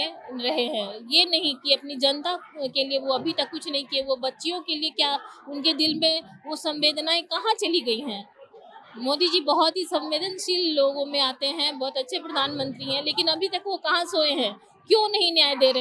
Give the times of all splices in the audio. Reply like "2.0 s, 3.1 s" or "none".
none

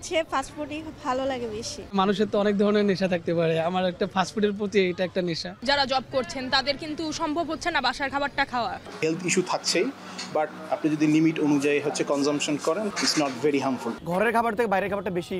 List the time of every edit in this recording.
1.8 s, 5.6 s, 8.9 s, 10.6 s, 12.9 s, 13.9 s

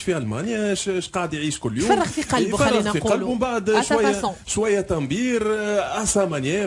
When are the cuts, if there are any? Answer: 5.7 s

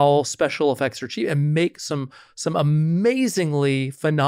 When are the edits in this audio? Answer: none

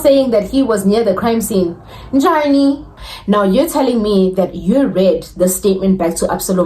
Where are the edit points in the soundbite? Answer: 2.9 s

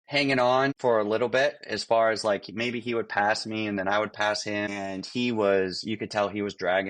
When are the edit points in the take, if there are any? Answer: 0.8 s, 4.7 s

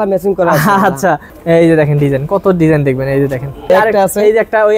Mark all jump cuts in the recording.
1.3 s, 3.7 s

